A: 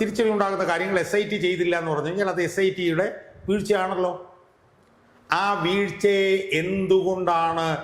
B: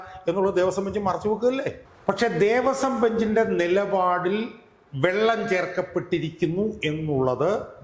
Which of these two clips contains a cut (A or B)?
B